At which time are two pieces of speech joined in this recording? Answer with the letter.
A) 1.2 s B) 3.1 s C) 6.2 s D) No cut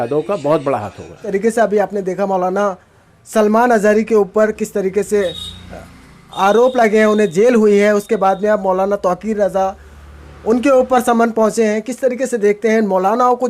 A